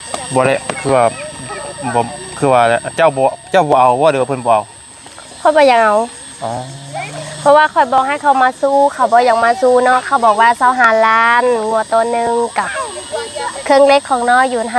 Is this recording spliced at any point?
no; 0 cuts

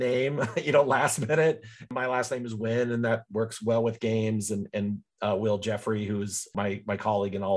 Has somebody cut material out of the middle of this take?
yes; 2 cuts; at 1.7 s, 6.5 s

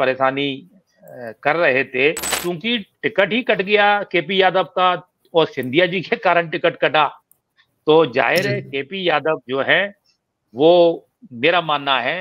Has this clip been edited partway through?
yes; 1 cut; at 2.3 s

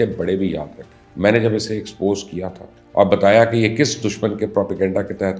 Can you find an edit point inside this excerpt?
no; 0 cuts

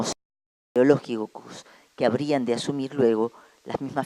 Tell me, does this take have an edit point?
no; 0 cuts

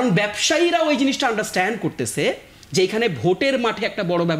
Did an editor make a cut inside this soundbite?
no; 0 cuts

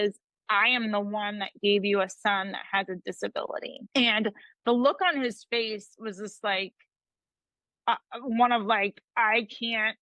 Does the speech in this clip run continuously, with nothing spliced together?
no; 1 cut; at 3.8 s

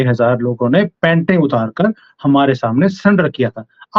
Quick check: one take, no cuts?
yes; 0 cuts

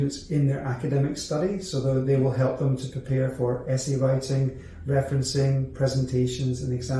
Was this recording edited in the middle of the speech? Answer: no; 0 cuts

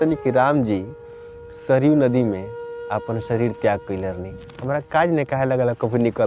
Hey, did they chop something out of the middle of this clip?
no; 0 cuts

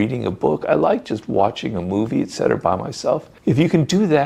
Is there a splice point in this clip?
no; 0 cuts

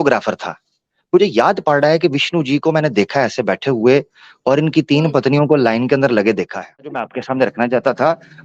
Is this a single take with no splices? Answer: no; 1 cut; at 7.1 s

